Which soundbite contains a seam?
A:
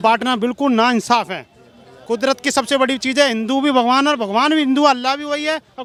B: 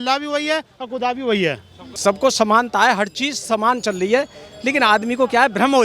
B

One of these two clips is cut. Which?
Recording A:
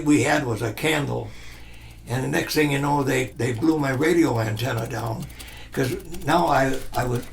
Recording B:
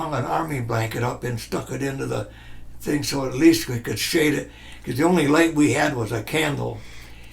A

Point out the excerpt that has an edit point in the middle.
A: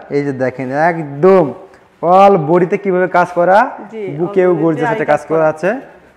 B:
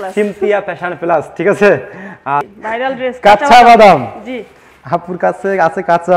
B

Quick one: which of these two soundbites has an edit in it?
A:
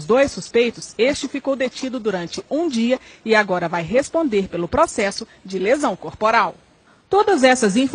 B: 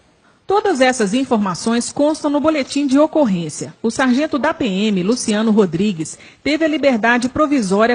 A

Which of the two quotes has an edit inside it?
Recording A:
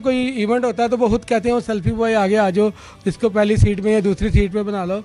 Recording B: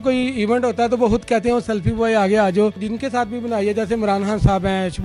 B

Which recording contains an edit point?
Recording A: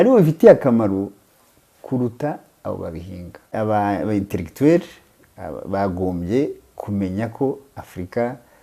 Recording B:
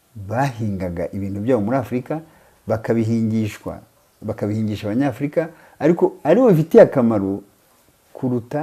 A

